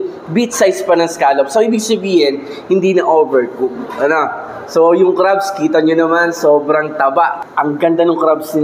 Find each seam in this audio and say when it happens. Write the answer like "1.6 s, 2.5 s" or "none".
7.4 s

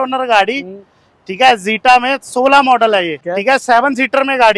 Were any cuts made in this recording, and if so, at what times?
3.2 s

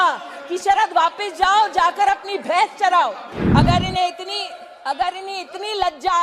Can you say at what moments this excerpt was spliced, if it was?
3.3 s

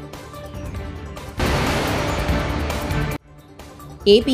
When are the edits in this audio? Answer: 1.4 s, 3.2 s

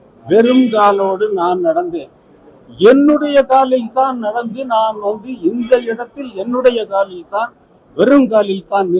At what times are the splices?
none

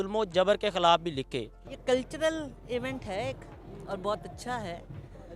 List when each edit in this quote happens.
1.7 s

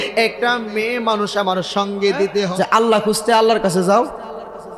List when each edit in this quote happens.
2.4 s

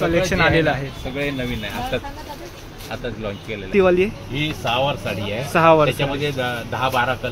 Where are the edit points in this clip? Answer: 3.7 s

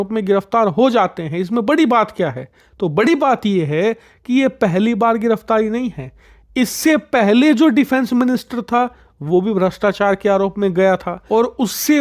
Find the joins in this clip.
none

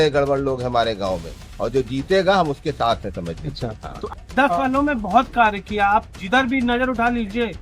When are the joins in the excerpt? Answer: 4.2 s

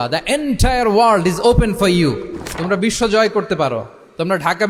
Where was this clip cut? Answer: none

